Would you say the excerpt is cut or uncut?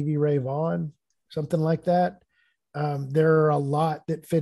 cut